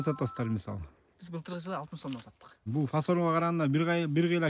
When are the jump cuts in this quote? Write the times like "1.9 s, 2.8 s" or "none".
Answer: 2.7 s